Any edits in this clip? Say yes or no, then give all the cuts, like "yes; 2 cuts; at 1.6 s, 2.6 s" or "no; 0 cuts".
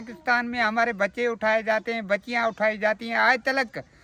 no; 0 cuts